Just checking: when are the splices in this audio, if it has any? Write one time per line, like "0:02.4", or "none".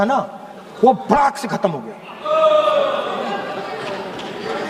none